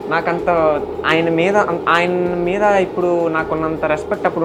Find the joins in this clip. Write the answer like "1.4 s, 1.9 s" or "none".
none